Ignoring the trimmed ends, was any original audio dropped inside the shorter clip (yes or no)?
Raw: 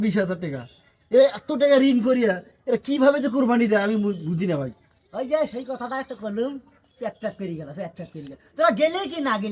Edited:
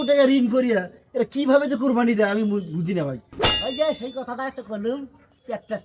no